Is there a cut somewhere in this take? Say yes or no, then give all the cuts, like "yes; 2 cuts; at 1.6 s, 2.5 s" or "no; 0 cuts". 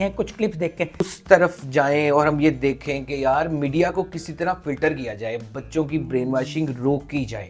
yes; 1 cut; at 1.0 s